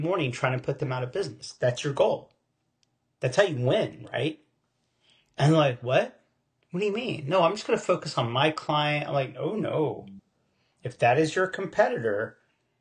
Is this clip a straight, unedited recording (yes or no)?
yes